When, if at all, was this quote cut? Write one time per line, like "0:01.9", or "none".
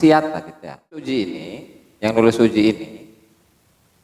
0:01.1